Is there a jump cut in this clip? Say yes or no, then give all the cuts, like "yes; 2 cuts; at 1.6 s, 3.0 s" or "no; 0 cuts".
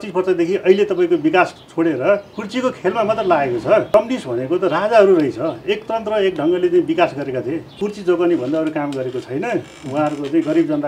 yes; 2 cuts; at 3.9 s, 7.7 s